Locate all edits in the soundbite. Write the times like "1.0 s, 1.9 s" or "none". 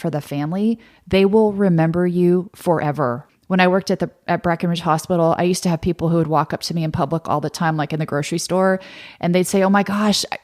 3.2 s